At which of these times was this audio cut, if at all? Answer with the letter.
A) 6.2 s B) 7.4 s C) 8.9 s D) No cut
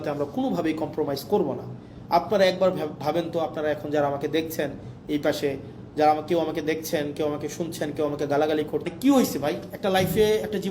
C